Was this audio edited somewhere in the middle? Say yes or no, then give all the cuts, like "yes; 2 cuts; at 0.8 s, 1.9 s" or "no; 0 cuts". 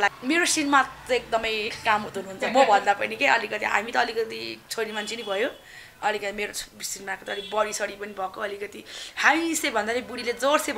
no; 0 cuts